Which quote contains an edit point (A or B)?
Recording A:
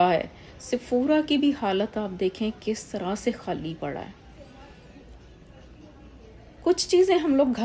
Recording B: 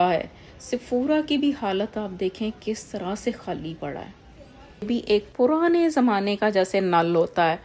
B